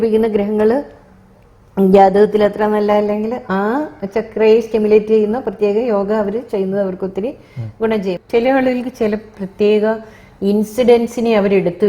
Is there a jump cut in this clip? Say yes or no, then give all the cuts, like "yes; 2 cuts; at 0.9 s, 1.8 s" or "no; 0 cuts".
yes; 1 cut; at 8.2 s